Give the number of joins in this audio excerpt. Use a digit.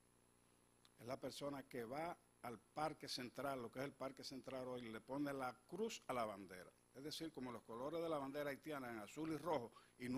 1